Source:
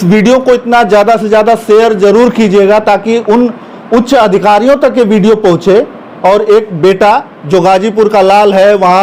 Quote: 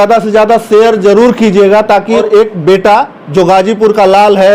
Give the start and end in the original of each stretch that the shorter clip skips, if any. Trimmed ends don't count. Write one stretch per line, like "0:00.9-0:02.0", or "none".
0:03.2-0:06.4